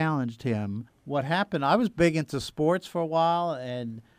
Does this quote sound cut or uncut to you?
cut